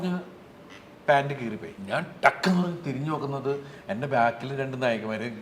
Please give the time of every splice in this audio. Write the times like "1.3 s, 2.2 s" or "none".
1.7 s